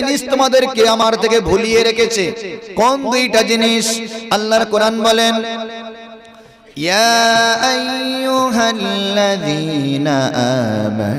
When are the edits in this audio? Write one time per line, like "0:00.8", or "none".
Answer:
0:01.0